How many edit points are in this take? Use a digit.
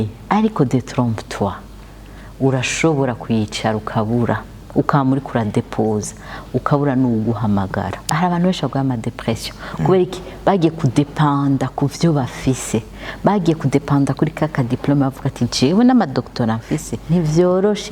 2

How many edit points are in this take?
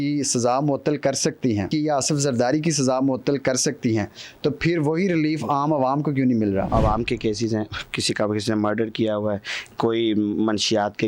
2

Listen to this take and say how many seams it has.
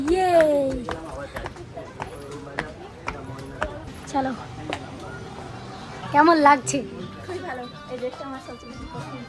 0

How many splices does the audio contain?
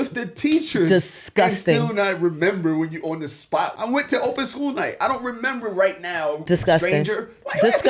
2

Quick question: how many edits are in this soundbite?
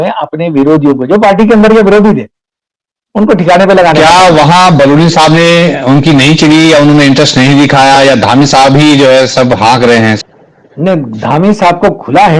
2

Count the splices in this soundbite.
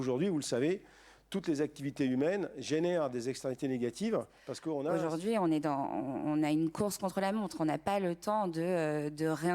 1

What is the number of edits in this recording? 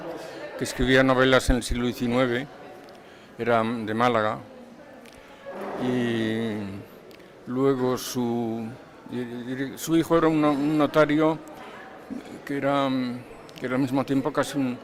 0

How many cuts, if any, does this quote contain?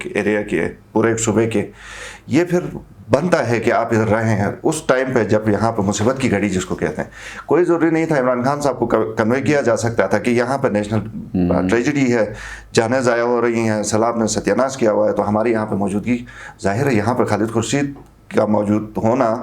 0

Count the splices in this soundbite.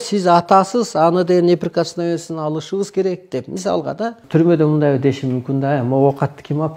1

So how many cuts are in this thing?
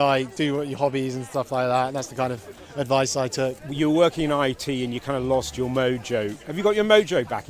1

